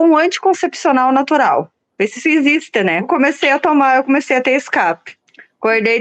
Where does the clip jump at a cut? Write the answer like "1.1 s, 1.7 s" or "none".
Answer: 3.1 s, 5.1 s

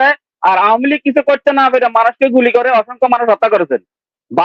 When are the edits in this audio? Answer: none

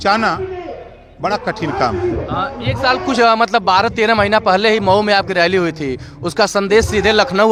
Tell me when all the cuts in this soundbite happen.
none

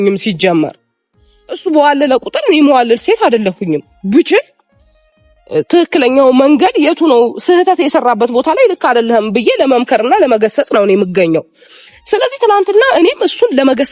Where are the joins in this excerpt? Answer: none

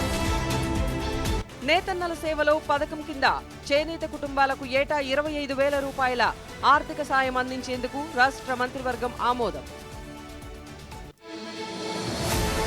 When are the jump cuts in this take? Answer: 1.3 s

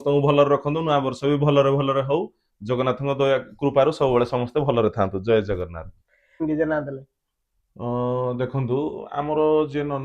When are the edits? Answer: 6.4 s

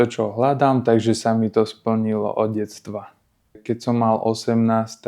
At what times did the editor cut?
3.6 s

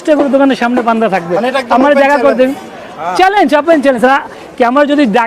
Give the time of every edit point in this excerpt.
4.4 s

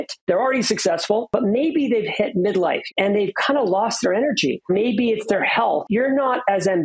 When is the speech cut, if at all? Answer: 1.3 s, 2.8 s, 4.7 s, 5.8 s

